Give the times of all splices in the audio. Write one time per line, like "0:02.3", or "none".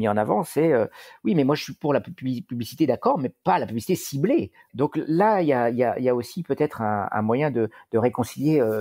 0:04.6

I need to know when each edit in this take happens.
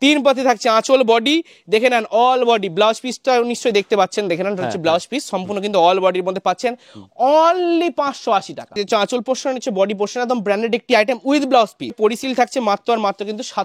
0:08.8
0:12.0

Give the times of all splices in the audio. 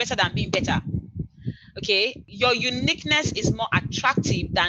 0:02.2

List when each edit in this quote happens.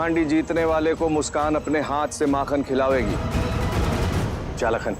0:03.2

